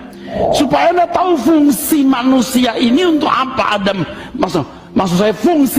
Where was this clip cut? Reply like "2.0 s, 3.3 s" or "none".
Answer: none